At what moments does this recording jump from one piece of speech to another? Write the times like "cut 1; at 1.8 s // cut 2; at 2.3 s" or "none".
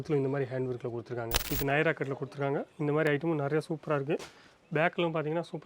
cut 1; at 1.4 s